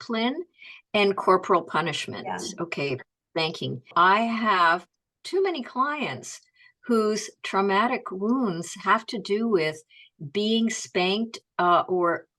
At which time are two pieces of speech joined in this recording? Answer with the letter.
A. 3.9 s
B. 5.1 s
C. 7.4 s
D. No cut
A